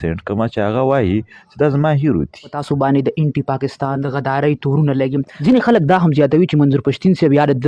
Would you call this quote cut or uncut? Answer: cut